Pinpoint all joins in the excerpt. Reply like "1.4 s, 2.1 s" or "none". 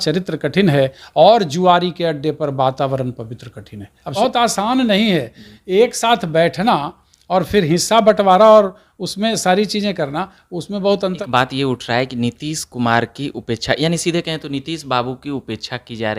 4.2 s, 11.2 s